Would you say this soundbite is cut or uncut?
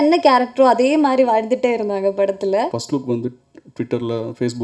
cut